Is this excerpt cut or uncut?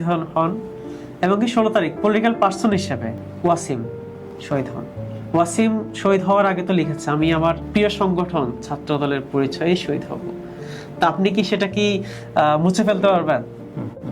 cut